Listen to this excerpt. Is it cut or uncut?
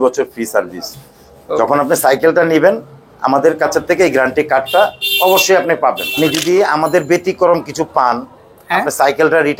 cut